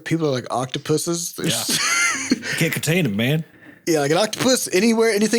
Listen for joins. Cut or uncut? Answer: uncut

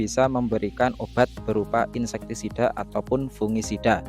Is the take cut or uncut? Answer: uncut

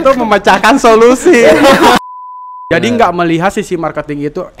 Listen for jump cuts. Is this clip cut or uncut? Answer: cut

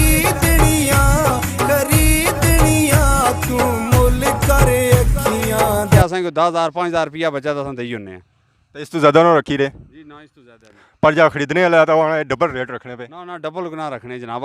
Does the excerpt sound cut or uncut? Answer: cut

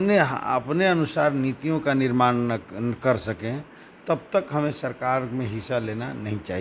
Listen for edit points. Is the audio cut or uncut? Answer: uncut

